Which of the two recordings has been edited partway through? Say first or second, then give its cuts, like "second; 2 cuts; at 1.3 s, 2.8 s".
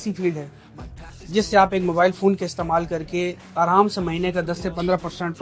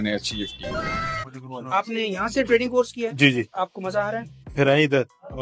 second; 2 cuts; at 1.3 s, 4.3 s